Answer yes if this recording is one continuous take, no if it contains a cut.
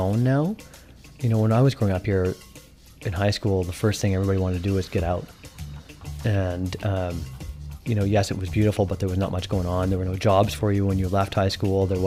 yes